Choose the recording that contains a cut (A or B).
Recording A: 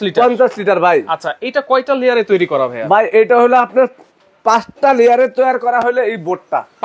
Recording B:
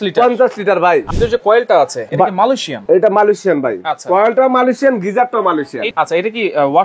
B